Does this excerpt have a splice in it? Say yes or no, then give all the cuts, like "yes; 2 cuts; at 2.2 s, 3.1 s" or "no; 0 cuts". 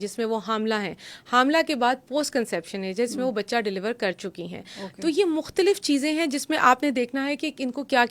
no; 0 cuts